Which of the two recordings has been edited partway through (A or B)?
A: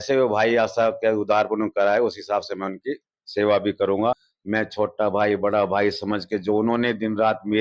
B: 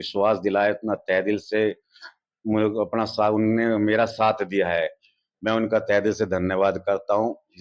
A